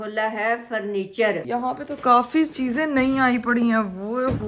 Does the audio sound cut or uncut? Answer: cut